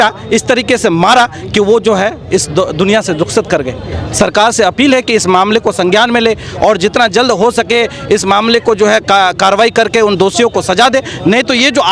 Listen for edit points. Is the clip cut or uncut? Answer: uncut